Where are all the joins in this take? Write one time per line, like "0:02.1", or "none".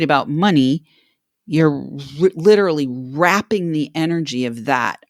none